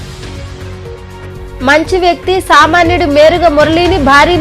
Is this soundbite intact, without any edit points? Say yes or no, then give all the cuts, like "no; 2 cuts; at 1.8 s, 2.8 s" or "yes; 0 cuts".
no; 1 cut; at 1.6 s